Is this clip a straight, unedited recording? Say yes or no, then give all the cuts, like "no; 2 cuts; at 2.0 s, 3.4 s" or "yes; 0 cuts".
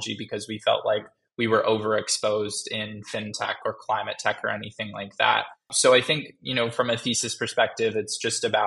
no; 1 cut; at 5.7 s